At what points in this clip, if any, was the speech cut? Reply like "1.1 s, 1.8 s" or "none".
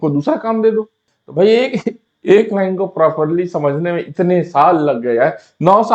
1.0 s

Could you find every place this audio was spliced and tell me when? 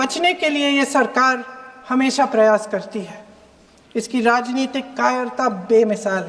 none

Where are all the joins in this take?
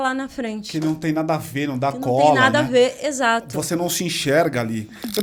none

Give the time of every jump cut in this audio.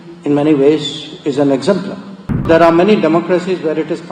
2.5 s

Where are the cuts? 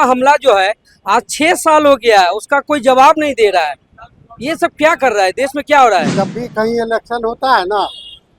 6.2 s

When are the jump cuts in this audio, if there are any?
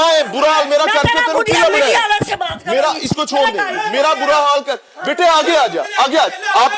none

